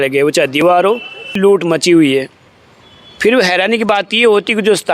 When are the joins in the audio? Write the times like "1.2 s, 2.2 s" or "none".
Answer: 1.2 s